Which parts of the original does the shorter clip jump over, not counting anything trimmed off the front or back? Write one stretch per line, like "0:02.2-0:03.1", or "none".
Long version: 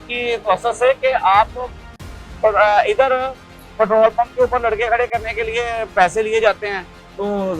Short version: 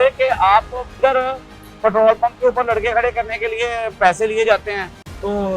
0:01.8-0:02.9

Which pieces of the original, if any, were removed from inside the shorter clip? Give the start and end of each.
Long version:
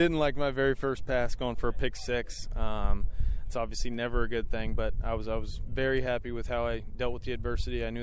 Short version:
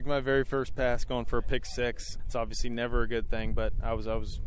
0:02.4-0:03.3

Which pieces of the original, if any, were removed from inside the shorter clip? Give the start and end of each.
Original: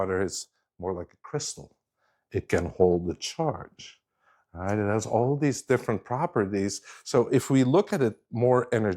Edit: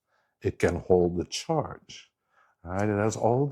none

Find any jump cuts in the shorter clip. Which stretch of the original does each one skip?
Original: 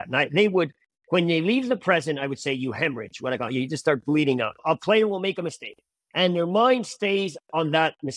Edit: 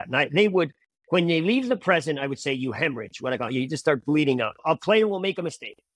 none

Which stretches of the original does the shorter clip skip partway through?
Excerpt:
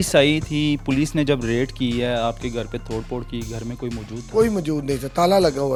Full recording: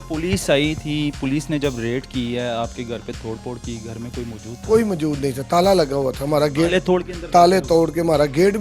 none

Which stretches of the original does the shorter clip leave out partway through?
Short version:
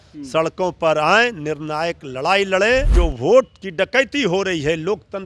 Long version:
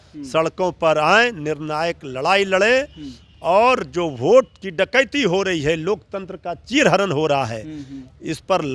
0:02.9-0:03.9

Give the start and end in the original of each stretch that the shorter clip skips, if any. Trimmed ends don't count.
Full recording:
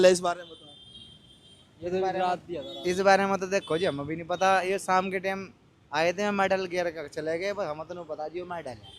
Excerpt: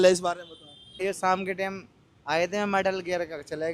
0:01.0-0:04.6

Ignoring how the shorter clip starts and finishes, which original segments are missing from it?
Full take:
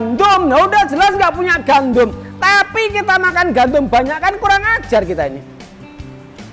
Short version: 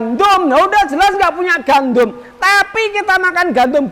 none

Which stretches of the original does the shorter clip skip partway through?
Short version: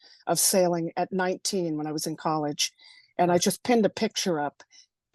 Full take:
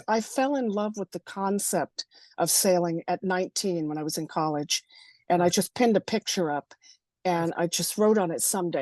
none

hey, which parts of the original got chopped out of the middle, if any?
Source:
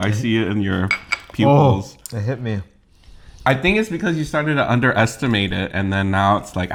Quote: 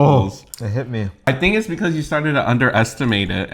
0:02.8-0:03.5

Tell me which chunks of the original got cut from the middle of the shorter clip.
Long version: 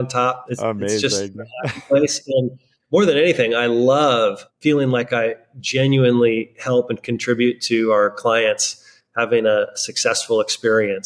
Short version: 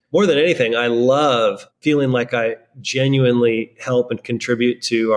none

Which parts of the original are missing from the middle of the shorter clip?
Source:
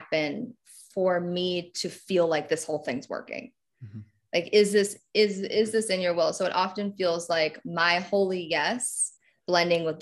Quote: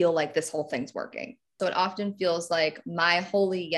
0:03.7-0:06.4

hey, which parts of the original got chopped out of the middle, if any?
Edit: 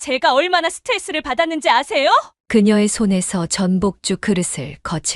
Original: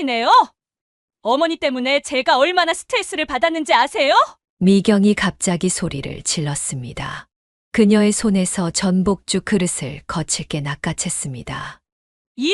0:04.4-0:07.6

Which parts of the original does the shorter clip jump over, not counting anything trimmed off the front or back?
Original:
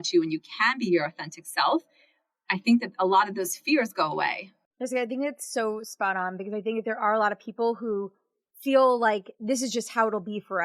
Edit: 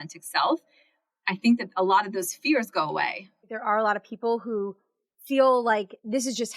0:04.7-0:06.9

